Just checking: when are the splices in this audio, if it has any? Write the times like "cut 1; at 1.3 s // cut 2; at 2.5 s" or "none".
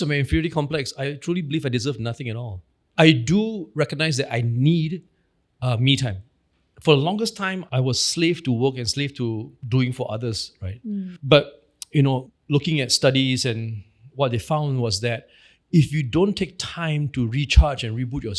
cut 1; at 1.1 s // cut 2; at 2.6 s // cut 3; at 9.5 s // cut 4; at 12.3 s